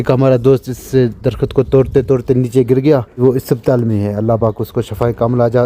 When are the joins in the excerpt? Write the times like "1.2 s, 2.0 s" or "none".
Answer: 3.2 s